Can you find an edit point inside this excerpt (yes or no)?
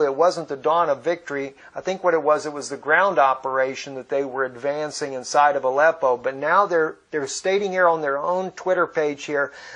yes